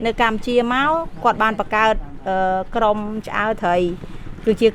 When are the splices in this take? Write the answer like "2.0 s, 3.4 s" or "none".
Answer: none